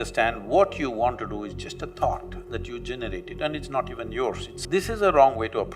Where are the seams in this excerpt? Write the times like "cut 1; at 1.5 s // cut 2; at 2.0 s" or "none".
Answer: cut 1; at 4.6 s